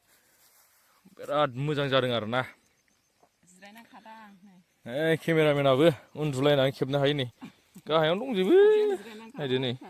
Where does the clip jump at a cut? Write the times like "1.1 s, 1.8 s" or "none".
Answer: none